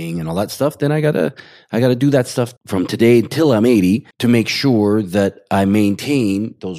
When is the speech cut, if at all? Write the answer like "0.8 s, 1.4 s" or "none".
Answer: 4.1 s